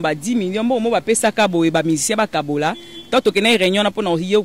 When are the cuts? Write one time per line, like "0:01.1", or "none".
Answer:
none